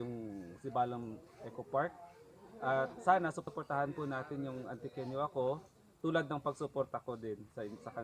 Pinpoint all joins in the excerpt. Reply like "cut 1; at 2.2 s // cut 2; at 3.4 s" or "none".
cut 1; at 3.5 s